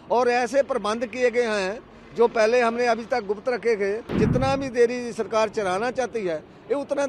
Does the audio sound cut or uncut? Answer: cut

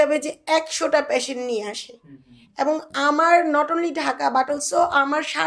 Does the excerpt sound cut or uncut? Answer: uncut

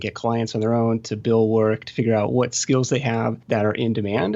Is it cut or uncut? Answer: cut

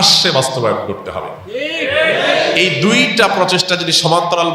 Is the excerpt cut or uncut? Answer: uncut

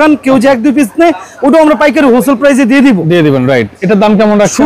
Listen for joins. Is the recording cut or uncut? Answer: uncut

